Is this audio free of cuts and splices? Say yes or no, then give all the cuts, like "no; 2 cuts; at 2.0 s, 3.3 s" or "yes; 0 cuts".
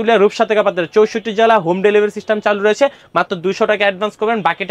yes; 0 cuts